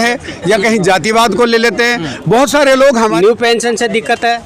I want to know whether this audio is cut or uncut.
cut